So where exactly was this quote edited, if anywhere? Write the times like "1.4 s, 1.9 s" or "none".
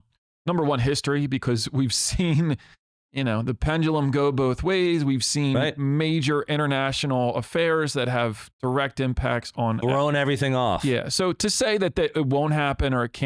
none